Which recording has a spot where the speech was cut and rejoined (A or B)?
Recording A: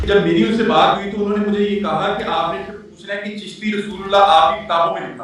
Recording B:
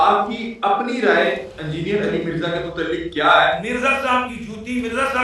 B